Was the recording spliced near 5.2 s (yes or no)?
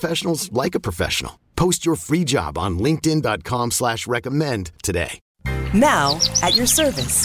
yes